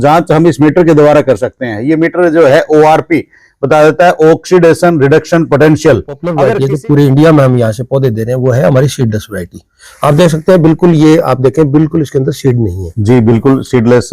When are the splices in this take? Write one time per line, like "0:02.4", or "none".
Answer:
0:06.3